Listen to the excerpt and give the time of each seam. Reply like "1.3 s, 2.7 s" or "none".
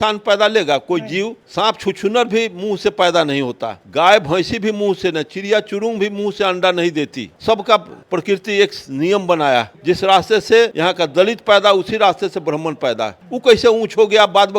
10.7 s, 13.2 s